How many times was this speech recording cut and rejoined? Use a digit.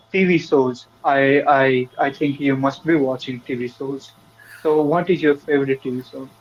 0